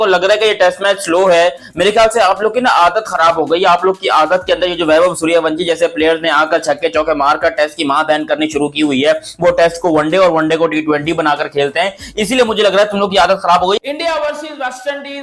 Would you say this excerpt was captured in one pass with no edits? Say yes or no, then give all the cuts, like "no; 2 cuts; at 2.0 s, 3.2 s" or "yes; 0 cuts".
no; 1 cut; at 13.8 s